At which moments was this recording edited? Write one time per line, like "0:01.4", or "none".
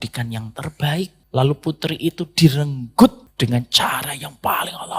0:01.2
0:03.2